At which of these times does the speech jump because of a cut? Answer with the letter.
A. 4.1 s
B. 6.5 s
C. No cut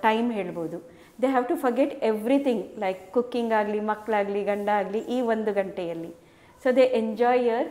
C